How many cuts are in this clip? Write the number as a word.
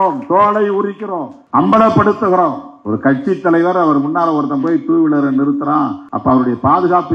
three